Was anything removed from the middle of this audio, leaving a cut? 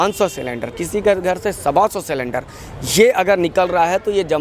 no; 0 cuts

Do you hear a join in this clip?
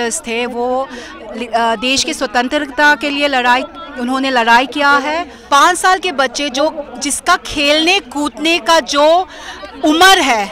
yes; 1 cut; at 5.3 s

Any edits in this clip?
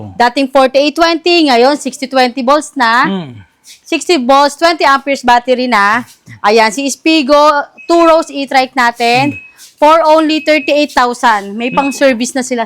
no; 0 cuts

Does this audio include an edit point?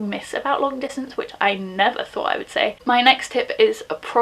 yes; 1 cut; at 2.8 s

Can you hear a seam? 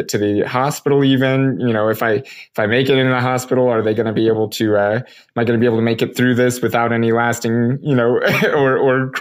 no; 0 cuts

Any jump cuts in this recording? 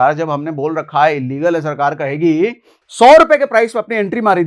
yes; 1 cut; at 2.7 s

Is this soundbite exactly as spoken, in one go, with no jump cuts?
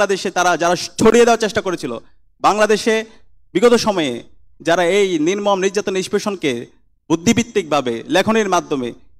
yes; 0 cuts

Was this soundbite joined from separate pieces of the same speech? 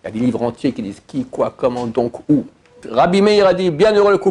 yes; 1 cut; at 2.8 s

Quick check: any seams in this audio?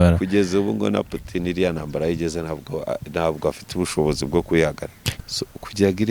yes; 1 cut; at 4.9 s

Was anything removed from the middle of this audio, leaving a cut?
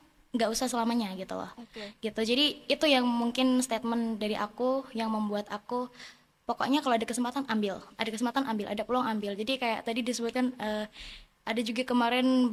no; 0 cuts

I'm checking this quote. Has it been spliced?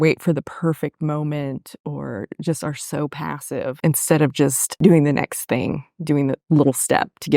yes; 2 cuts; at 3.8 s, 4.7 s

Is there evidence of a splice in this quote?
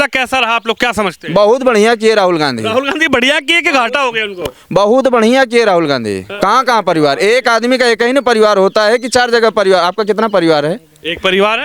yes; 1 cut; at 6.2 s

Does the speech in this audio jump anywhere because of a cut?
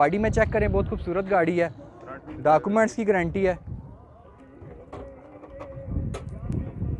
no; 0 cuts

